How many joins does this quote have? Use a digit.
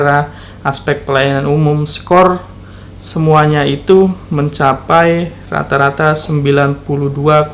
0